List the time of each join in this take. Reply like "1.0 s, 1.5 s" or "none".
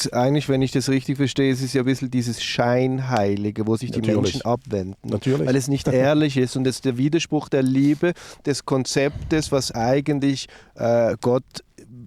none